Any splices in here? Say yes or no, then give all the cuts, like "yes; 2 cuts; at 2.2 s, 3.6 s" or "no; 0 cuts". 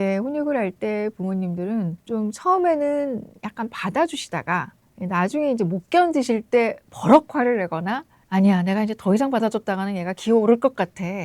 yes; 1 cut; at 2.0 s